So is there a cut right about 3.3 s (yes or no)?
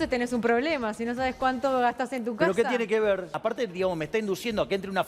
yes